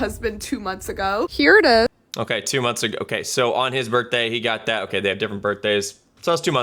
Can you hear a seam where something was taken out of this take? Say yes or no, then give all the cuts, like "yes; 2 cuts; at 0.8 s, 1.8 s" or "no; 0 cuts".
no; 0 cuts